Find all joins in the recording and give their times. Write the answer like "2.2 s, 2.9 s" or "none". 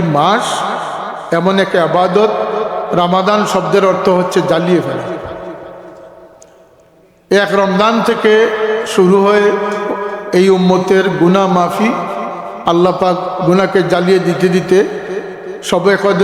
none